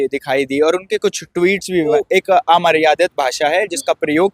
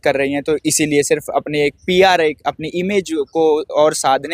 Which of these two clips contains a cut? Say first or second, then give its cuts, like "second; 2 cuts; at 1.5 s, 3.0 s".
first; 1 cut; at 1.9 s